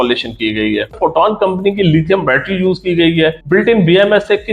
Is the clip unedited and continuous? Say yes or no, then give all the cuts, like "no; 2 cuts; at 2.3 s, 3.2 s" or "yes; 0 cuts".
no; 2 cuts; at 1.0 s, 3.4 s